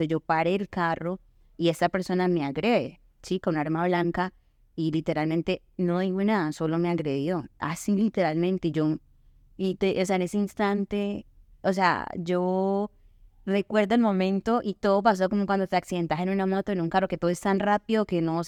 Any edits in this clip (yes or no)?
no